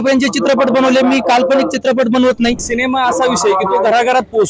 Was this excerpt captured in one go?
no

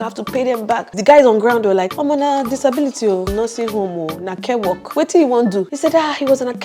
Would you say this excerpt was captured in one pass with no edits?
no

